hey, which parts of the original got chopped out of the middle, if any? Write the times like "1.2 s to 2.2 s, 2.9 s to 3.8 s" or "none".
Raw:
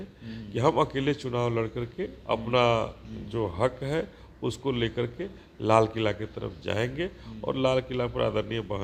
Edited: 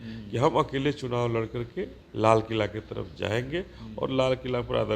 2.2 s to 5.4 s